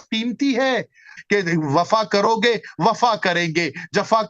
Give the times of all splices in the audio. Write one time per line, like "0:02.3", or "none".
0:01.1